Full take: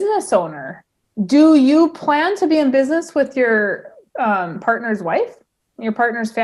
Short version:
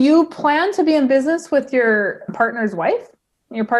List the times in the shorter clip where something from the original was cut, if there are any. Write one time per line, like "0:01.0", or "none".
0:02.3